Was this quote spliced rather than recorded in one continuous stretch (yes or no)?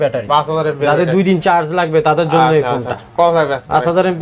no